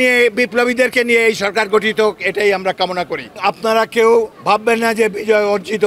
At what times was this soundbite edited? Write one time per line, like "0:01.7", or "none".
0:03.3
0:04.3